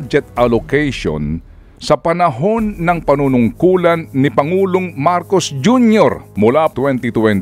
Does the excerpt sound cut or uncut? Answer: cut